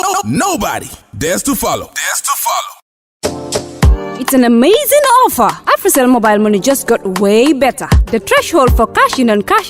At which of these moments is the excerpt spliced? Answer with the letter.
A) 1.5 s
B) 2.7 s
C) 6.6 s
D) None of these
D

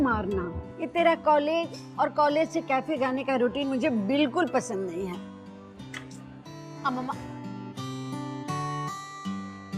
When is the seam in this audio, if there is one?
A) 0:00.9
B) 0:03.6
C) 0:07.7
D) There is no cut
A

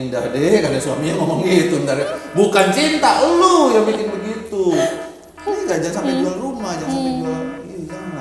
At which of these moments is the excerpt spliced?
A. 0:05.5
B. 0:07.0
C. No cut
C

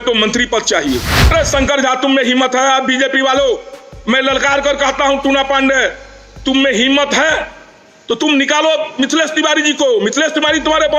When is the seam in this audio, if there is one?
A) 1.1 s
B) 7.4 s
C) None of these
A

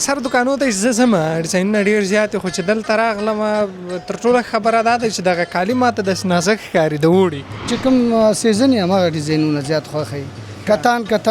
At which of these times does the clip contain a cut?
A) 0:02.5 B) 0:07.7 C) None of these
B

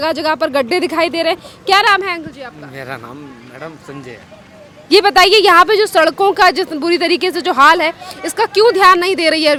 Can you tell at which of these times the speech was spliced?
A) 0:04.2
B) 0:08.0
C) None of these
C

